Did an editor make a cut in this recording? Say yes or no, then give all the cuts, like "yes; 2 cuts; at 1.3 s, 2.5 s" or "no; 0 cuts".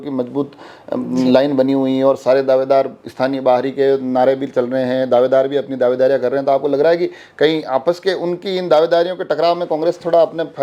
no; 0 cuts